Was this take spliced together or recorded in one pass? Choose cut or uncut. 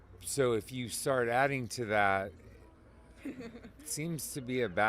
uncut